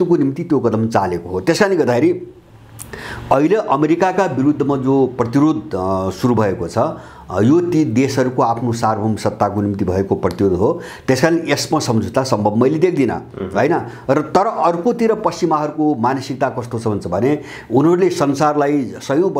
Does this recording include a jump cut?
no; 0 cuts

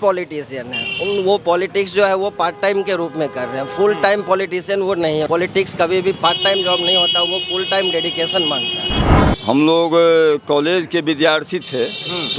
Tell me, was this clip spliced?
yes; 2 cuts; at 5.3 s, 9.1 s

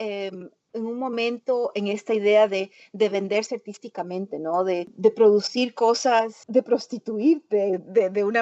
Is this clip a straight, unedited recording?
no; 2 cuts; at 4.9 s, 6.4 s

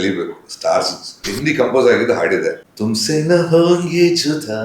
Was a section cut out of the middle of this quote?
yes; 2 cuts; at 1.2 s, 2.5 s

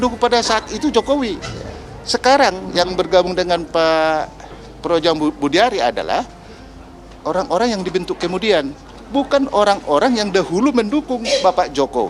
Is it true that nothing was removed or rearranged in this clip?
yes; 0 cuts

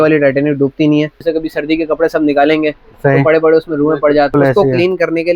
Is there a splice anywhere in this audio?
yes; 2 cuts; at 1.2 s, 4.3 s

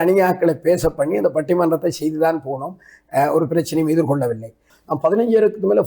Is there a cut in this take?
yes; 1 cut; at 4.7 s

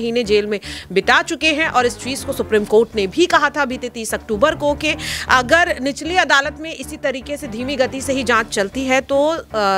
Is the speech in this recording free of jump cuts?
yes; 0 cuts

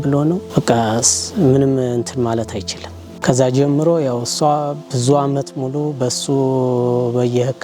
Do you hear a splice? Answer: yes; 1 cut; at 3.2 s

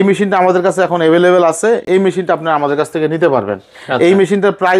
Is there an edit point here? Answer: no; 0 cuts

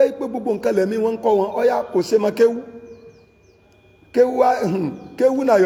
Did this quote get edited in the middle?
no; 0 cuts

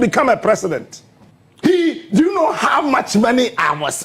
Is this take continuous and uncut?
yes; 0 cuts

